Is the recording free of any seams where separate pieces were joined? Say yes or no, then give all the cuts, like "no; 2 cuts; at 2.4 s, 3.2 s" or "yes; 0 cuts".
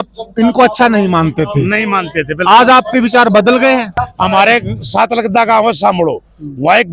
no; 1 cut; at 4.0 s